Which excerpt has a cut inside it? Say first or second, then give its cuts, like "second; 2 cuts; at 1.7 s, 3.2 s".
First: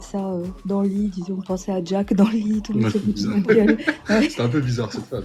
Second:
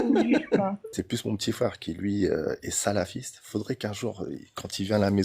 second; 1 cut; at 0.9 s